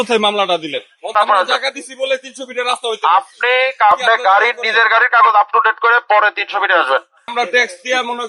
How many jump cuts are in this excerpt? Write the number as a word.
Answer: three